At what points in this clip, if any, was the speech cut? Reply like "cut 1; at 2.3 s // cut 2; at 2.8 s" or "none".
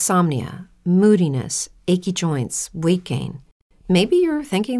none